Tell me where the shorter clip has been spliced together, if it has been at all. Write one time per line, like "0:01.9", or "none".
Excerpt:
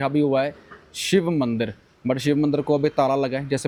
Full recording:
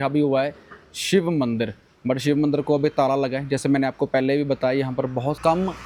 none